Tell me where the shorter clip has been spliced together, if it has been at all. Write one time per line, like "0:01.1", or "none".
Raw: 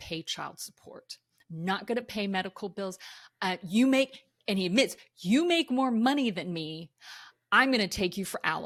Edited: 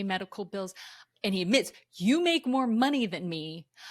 0:01.0